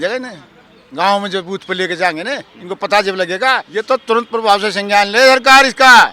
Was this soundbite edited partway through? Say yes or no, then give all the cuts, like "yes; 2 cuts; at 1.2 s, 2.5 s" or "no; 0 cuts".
yes; 1 cut; at 3.7 s